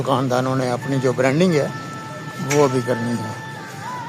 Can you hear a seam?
no; 0 cuts

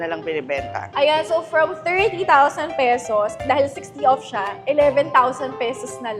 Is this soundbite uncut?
yes; 0 cuts

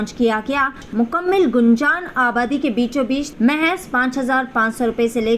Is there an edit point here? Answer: yes; 2 cuts; at 0.8 s, 3.3 s

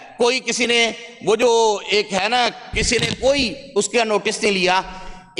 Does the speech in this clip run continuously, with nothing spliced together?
yes; 0 cuts

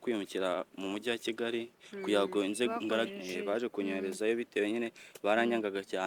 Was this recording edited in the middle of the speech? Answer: yes; 1 cut; at 3.1 s

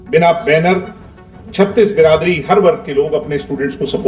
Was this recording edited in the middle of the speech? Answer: no; 0 cuts

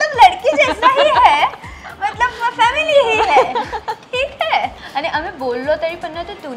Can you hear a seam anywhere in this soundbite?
yes; 1 cut; at 4.7 s

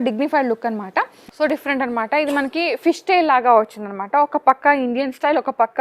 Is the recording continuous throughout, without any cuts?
no; 1 cut; at 1.2 s

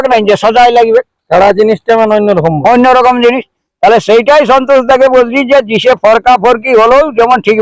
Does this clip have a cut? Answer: no; 0 cuts

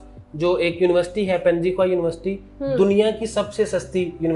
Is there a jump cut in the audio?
no; 0 cuts

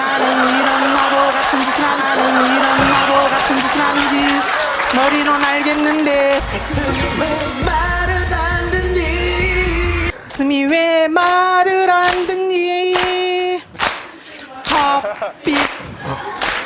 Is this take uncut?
no; 2 cuts; at 2.0 s, 3.9 s

